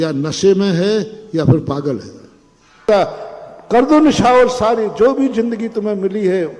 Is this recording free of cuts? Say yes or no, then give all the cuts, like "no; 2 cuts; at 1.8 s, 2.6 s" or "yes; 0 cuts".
no; 1 cut; at 2.9 s